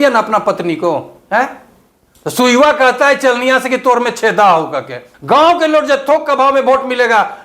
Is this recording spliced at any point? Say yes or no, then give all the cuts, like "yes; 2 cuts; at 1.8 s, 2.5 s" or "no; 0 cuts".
yes; 1 cut; at 5.0 s